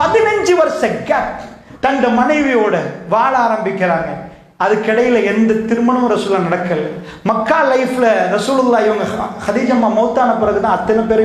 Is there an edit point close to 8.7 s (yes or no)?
no